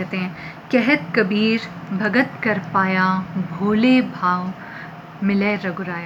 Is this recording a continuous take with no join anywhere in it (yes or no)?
yes